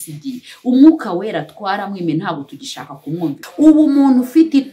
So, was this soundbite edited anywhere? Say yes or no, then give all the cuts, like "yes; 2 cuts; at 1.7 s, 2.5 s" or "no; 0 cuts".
yes; 1 cut; at 3.4 s